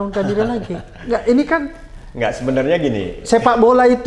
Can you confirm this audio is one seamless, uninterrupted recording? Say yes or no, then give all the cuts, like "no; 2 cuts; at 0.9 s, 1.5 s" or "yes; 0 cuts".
yes; 0 cuts